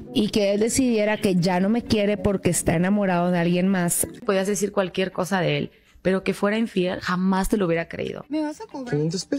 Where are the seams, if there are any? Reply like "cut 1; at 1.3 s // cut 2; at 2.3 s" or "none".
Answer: cut 1; at 4.2 s // cut 2; at 8.2 s